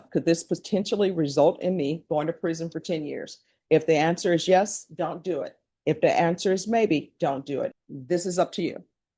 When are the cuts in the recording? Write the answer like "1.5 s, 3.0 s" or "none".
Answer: 7.8 s